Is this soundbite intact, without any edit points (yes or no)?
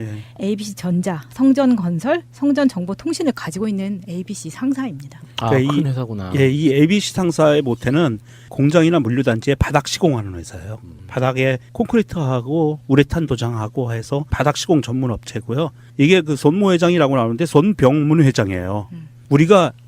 no